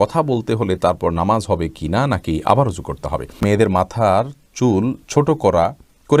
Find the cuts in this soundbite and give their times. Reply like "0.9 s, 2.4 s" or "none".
3.4 s